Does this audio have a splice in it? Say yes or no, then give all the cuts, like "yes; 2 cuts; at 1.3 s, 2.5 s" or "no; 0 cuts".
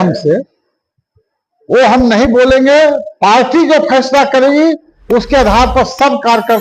no; 0 cuts